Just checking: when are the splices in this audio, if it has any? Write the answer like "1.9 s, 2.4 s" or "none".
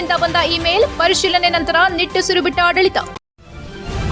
3.1 s